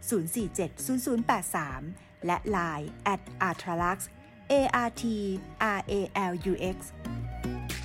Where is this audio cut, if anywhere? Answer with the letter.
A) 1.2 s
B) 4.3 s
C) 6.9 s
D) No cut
C